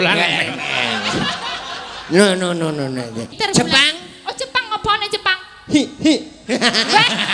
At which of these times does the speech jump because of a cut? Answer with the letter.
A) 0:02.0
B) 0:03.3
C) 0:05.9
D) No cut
B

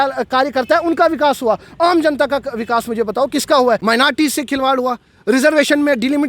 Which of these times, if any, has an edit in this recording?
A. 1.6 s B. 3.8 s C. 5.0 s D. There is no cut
B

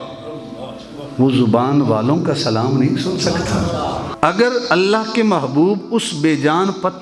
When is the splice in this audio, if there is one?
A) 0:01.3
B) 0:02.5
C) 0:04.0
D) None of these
C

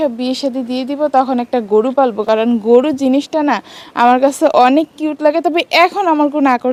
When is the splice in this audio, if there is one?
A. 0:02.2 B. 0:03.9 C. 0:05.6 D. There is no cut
D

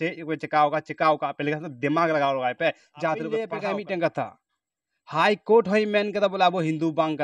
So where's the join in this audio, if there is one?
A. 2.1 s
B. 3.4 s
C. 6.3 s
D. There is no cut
B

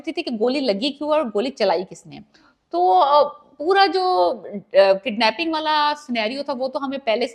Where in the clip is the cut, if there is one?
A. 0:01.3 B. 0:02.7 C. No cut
C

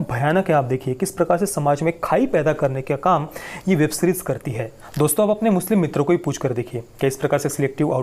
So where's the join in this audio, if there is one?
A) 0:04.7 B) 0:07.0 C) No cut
A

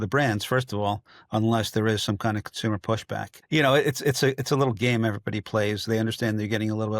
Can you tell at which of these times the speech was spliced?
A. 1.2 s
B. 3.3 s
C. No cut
B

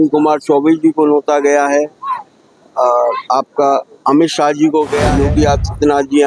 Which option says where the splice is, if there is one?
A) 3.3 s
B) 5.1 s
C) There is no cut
B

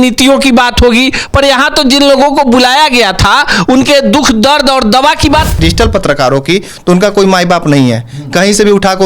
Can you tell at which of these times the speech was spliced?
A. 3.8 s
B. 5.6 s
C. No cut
B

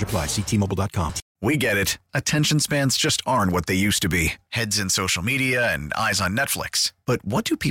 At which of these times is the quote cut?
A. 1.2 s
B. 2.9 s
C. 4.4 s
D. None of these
A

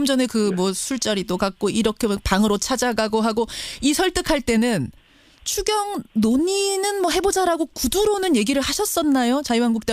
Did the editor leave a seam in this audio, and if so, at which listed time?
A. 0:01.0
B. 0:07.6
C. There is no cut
A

